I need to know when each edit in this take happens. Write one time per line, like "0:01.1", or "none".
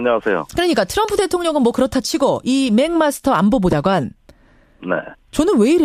0:00.9